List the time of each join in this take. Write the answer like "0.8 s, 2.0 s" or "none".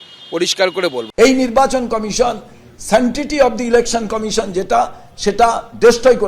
1.1 s